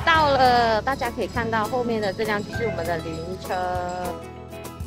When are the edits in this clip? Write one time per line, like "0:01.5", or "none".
none